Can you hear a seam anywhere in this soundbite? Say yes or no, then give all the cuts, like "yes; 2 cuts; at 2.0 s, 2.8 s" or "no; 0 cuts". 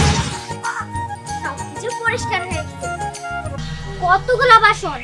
yes; 1 cut; at 3.6 s